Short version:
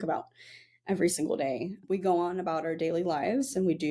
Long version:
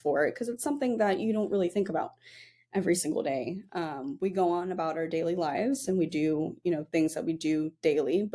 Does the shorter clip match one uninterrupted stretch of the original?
no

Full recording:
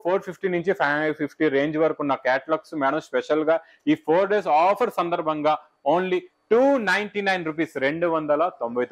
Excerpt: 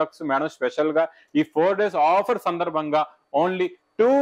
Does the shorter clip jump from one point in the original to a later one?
no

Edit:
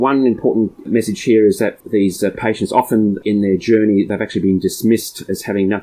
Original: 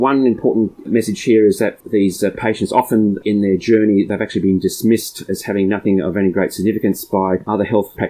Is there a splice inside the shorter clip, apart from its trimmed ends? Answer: no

